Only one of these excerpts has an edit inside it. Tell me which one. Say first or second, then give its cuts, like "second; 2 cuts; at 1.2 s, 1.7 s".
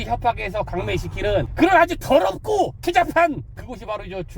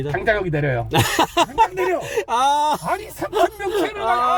first; 3 cuts; at 1.5 s, 2.8 s, 3.5 s